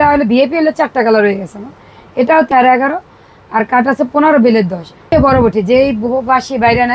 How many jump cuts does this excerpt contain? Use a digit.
2